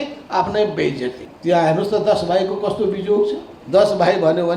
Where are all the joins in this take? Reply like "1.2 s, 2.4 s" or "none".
1.3 s, 3.5 s